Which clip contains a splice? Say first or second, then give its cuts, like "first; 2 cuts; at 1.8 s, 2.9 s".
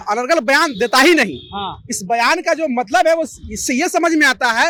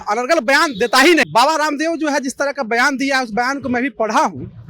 second; 1 cut; at 1.3 s